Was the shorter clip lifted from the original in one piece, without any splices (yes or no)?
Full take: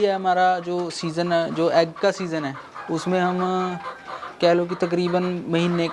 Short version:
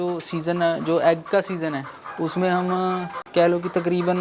no